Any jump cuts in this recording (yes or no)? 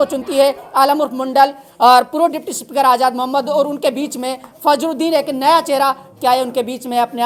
no